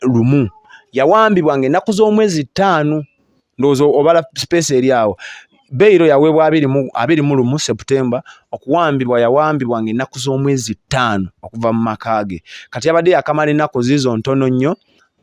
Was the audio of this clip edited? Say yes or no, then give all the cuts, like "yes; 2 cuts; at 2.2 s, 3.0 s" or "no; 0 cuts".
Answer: no; 0 cuts